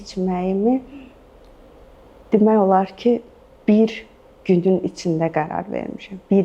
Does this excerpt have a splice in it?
no; 0 cuts

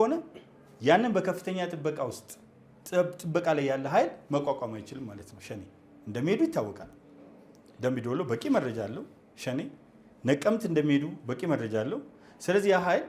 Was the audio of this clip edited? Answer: no; 0 cuts

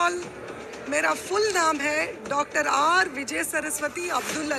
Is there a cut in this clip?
no; 0 cuts

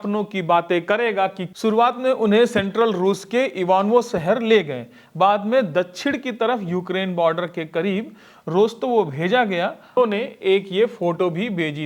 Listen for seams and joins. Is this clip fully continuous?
no; 2 cuts; at 1.4 s, 10.0 s

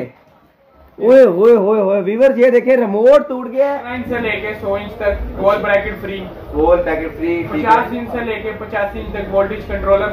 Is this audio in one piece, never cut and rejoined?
no; 1 cut; at 4.0 s

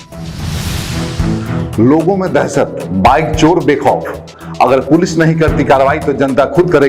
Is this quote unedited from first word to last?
yes; 0 cuts

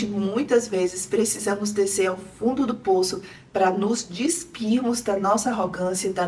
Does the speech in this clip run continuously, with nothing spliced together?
yes; 0 cuts

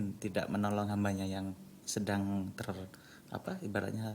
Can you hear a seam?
no; 0 cuts

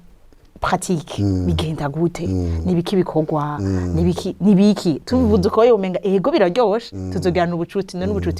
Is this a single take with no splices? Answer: yes; 0 cuts

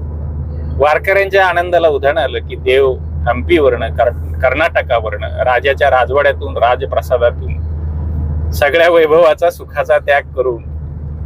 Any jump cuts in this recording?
no; 0 cuts

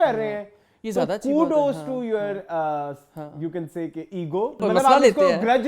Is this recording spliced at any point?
yes; 1 cut; at 4.6 s

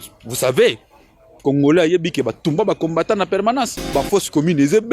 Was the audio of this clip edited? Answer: yes; 1 cut; at 3.9 s

